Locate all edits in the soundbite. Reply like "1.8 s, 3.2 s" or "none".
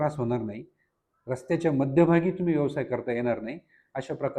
none